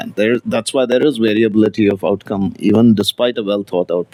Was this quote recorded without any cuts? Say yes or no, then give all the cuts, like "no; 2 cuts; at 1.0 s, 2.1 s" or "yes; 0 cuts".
yes; 0 cuts